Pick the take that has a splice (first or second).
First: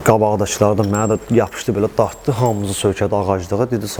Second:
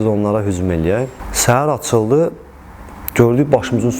second